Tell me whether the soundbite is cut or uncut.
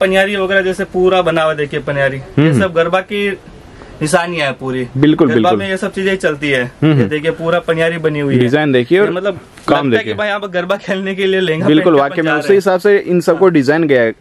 uncut